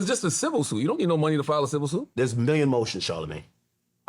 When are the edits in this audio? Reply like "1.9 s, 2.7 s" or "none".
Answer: 2.1 s